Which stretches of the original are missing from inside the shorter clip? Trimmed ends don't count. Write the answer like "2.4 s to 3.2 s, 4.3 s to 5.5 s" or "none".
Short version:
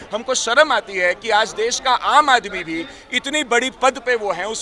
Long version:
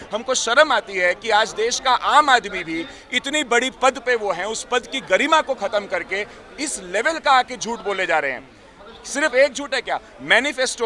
none